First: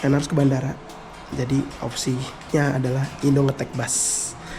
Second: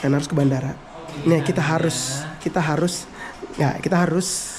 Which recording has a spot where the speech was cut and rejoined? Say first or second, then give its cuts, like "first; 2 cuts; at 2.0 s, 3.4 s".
second; 1 cut; at 1.1 s